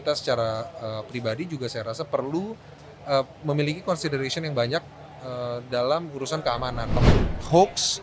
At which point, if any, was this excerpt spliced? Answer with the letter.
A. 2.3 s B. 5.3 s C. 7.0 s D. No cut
C